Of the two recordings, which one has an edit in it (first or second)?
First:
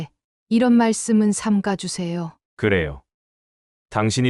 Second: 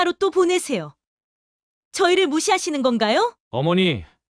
second